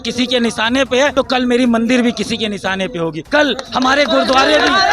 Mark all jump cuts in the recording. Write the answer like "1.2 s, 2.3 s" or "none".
1.1 s, 3.2 s